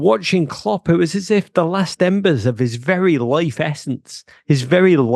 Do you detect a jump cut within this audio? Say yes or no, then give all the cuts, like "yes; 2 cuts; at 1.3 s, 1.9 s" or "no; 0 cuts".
no; 0 cuts